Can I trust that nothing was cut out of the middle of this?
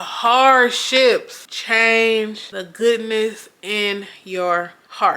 yes; 0 cuts

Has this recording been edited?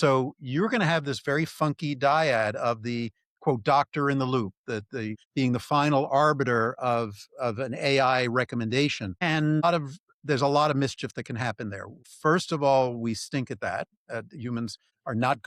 no; 0 cuts

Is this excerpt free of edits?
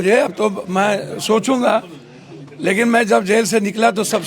yes; 0 cuts

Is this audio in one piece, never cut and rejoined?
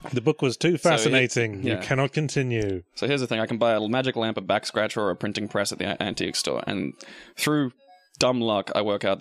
no; 1 cut; at 7.1 s

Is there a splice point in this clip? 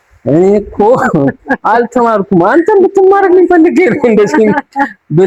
no; 0 cuts

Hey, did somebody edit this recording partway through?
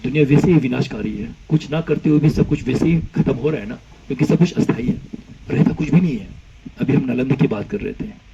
no; 0 cuts

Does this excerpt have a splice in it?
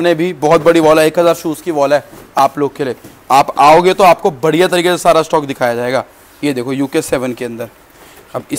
no; 0 cuts

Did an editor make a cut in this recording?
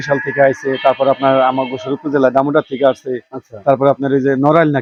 no; 0 cuts

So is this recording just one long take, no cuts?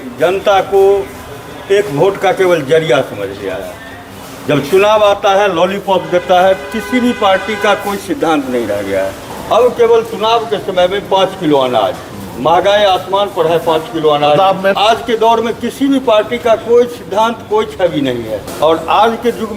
no; 3 cuts; at 9.3 s, 14.7 s, 18.4 s

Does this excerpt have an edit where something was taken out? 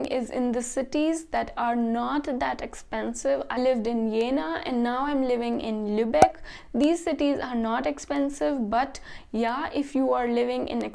yes; 1 cut; at 3.6 s

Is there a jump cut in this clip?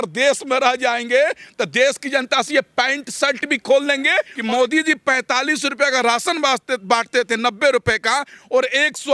yes; 1 cut; at 4.3 s

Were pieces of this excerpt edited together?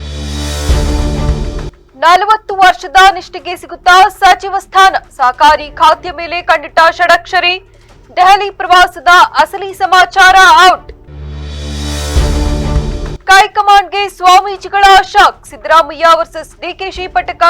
yes; 1 cut; at 1.7 s

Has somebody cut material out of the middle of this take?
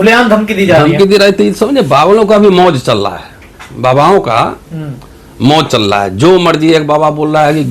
no; 0 cuts

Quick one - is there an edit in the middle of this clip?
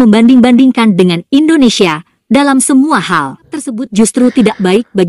yes; 1 cut; at 3.5 s

